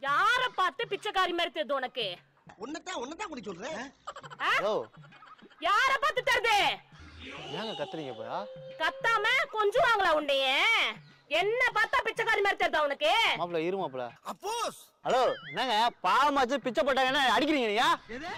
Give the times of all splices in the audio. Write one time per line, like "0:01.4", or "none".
none